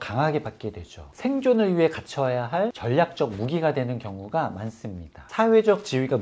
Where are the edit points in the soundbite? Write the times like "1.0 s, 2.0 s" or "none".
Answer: 1.1 s

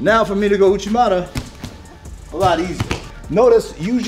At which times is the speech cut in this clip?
3.1 s

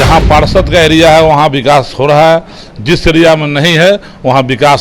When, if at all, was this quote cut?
none

